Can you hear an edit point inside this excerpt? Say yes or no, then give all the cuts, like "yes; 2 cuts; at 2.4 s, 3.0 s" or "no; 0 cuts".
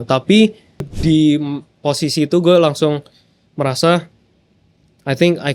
yes; 1 cut; at 0.9 s